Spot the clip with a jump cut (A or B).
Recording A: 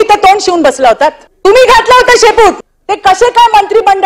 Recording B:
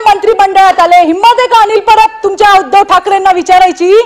A